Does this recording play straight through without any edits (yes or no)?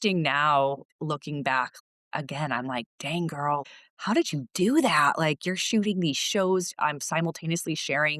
no